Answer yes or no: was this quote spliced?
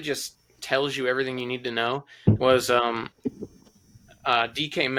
no